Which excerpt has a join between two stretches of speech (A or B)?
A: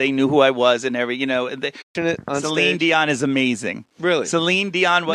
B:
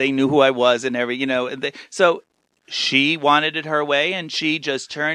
B